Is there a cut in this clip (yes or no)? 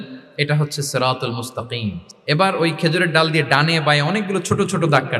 yes